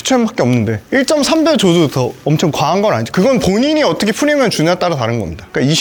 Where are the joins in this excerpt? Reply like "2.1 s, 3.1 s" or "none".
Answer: none